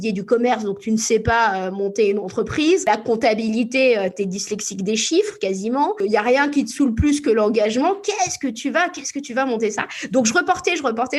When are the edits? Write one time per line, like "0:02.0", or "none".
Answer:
0:02.9
0:06.0